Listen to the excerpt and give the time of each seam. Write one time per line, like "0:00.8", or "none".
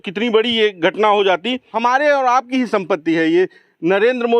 0:01.7